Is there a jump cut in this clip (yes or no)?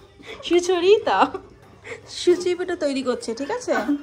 no